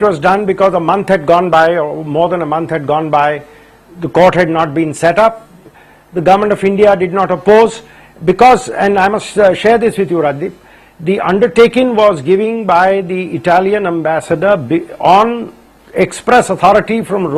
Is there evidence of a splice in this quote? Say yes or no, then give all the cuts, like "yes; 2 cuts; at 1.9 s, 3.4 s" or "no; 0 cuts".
no; 0 cuts